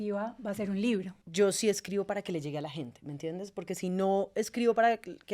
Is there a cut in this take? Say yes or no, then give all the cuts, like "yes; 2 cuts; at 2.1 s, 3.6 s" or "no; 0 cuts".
yes; 1 cut; at 1.2 s